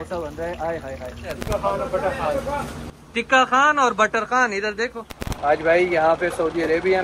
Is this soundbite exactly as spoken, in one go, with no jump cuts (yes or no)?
no